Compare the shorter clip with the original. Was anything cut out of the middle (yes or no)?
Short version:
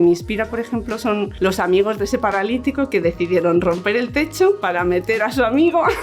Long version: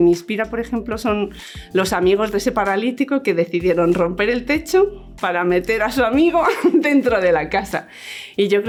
yes